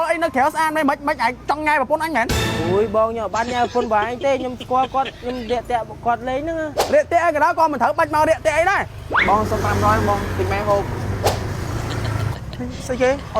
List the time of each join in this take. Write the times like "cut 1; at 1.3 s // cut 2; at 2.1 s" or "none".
cut 1; at 2.3 s // cut 2; at 5.2 s // cut 3; at 6.8 s // cut 4; at 9.1 s // cut 5; at 12.3 s